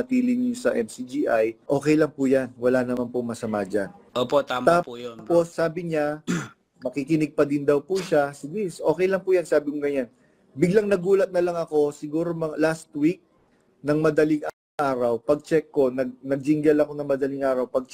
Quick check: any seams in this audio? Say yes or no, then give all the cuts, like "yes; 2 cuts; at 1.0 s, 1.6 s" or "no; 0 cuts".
yes; 3 cuts; at 1.6 s, 4.0 s, 5.5 s